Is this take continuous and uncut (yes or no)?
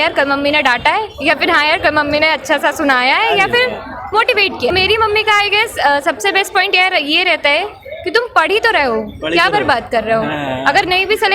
no